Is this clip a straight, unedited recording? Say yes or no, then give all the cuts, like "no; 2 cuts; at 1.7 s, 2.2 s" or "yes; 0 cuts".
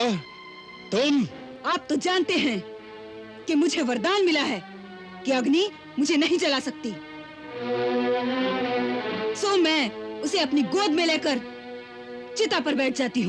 no; 1 cut; at 1.5 s